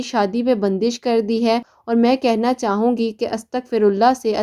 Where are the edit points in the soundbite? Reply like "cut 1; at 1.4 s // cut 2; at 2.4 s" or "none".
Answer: cut 1; at 1.7 s